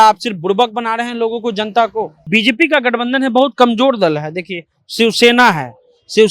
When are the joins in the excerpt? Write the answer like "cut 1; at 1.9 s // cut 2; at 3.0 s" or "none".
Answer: cut 1; at 2.3 s